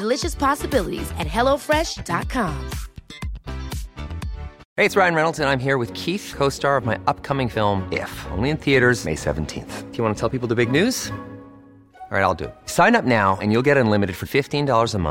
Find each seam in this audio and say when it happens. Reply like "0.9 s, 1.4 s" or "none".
4.6 s